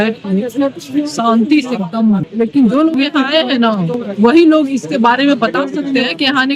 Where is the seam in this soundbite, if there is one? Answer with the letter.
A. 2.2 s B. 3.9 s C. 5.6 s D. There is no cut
A